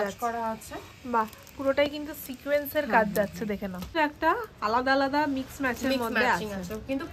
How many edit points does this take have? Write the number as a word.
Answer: one